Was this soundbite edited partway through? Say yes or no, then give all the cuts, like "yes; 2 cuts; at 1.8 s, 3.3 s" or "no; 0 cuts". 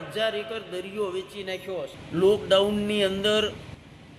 yes; 1 cut; at 2.0 s